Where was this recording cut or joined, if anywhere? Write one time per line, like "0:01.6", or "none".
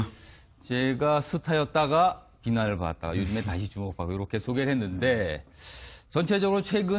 none